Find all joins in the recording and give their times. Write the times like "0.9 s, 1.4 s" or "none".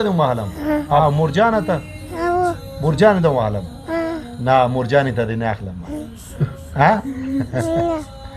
1.0 s

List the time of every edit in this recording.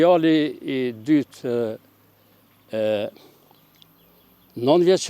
none

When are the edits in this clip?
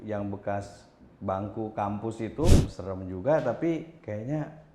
2.5 s

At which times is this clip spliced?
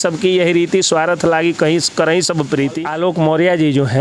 2.8 s

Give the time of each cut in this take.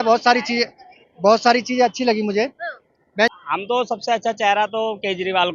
3.3 s

